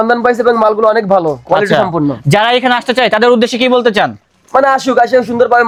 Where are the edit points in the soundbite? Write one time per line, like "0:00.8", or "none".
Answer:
none